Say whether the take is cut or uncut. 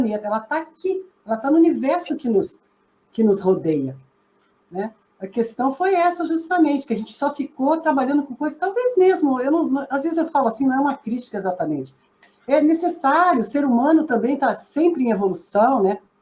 uncut